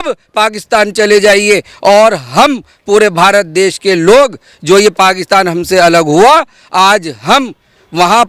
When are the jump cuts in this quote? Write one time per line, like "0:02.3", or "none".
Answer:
none